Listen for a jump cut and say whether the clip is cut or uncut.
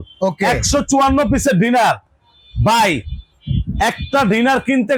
uncut